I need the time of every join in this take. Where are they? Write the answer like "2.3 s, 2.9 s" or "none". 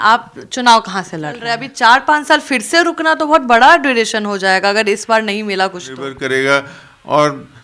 1.6 s, 6.1 s